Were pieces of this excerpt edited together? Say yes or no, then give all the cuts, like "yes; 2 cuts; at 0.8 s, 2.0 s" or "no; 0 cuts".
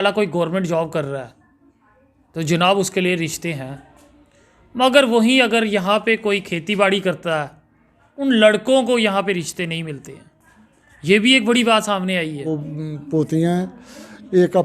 yes; 1 cut; at 12.6 s